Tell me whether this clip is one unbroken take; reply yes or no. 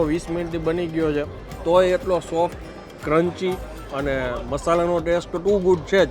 no